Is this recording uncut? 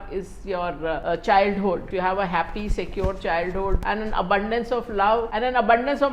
no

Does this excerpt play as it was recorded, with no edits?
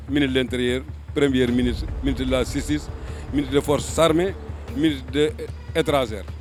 yes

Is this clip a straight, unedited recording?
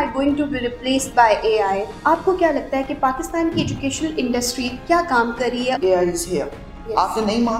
no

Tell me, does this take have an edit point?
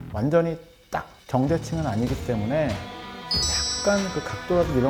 no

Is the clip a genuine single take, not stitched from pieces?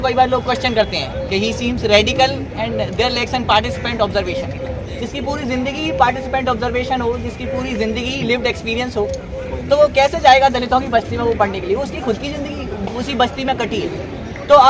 yes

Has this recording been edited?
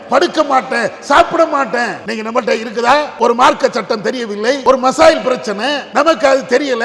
yes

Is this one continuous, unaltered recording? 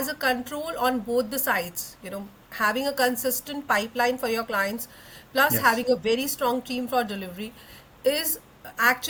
yes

